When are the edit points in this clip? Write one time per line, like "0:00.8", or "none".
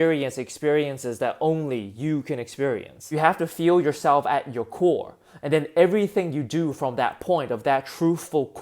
0:03.2